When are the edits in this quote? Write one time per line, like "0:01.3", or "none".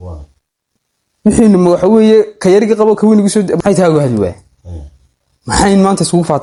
none